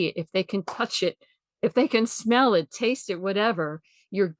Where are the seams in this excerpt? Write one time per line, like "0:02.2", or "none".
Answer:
none

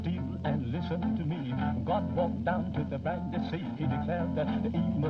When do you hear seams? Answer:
none

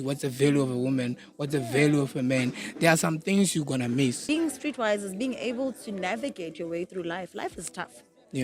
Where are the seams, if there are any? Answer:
0:04.2

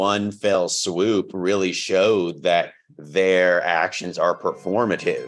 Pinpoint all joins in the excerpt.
none

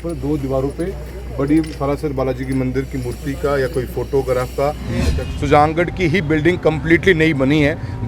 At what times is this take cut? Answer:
0:05.2

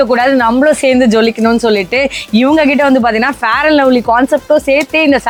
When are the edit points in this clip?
none

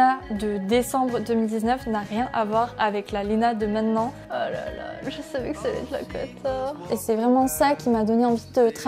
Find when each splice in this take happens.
0:04.3
0:06.9

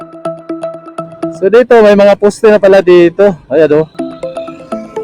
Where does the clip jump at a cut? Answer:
0:01.4
0:03.9

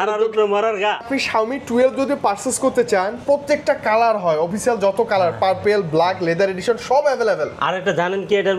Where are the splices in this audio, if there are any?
0:01.1

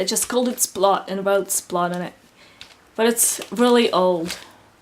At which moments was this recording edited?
0:01.9

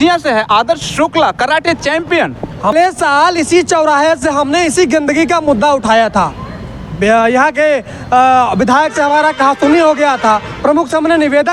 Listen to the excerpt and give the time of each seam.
0:02.7

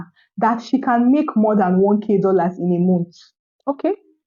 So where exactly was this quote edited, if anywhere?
none

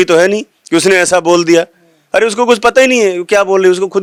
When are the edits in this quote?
none

